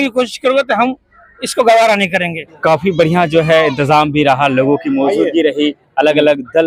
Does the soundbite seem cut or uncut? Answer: uncut